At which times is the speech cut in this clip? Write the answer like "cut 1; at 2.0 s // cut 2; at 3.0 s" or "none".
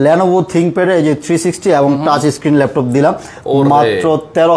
none